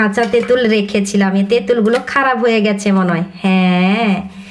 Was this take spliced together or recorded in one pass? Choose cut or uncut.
uncut